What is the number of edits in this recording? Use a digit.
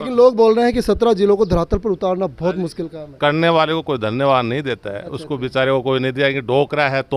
0